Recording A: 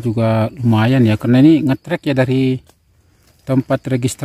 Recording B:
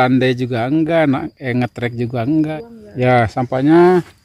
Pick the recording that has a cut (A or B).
B